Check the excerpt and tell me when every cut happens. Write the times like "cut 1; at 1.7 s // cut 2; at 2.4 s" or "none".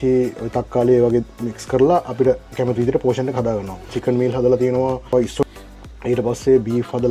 cut 1; at 3.9 s // cut 2; at 5.4 s